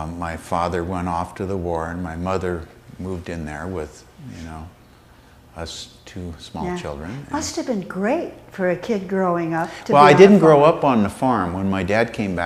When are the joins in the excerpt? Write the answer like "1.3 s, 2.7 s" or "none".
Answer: none